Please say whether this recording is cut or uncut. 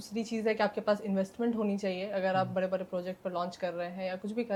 uncut